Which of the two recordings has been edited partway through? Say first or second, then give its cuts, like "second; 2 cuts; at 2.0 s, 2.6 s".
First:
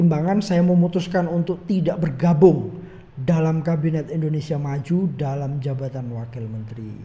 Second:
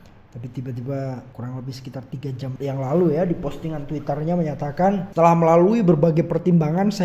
second; 3 cuts; at 1.3 s, 2.5 s, 5.1 s